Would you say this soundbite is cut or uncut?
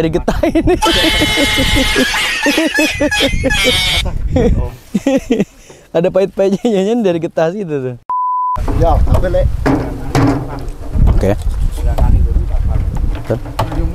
uncut